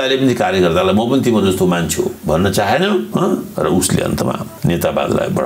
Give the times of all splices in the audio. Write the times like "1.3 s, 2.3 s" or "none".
3.1 s, 4.5 s